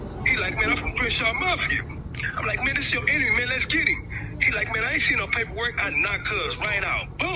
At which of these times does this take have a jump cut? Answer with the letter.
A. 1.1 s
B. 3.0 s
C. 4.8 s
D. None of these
D